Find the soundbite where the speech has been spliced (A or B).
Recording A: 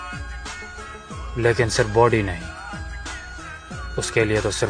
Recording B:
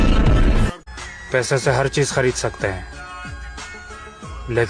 B